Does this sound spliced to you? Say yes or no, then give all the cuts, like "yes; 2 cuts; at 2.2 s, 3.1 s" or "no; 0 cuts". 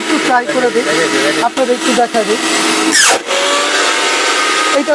no; 0 cuts